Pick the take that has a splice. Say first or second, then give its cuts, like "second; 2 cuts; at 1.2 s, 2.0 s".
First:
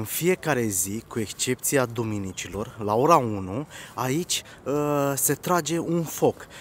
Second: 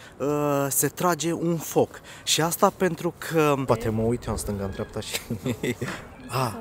second; 1 cut; at 3.6 s